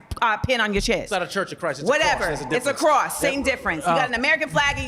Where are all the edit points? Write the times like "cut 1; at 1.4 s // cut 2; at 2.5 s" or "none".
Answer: none